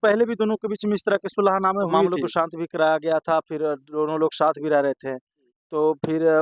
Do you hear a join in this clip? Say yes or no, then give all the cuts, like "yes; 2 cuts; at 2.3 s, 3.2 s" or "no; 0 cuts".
yes; 1 cut; at 2.1 s